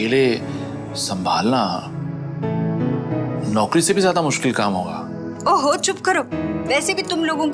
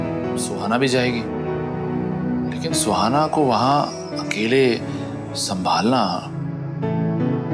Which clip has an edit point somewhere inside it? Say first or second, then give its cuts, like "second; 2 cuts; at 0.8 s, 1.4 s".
second; 1 cut; at 2.5 s